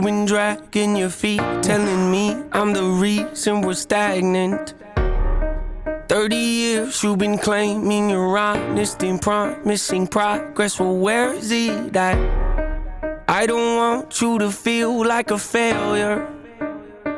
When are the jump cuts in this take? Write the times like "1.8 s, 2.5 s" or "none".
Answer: 12.8 s